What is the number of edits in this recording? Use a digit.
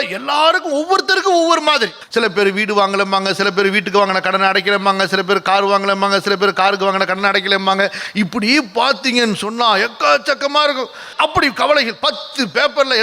2